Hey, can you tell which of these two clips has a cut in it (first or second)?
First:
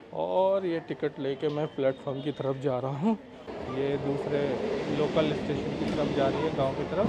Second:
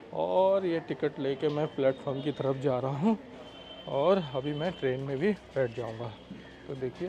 first